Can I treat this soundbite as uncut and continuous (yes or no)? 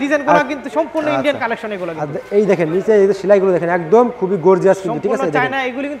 yes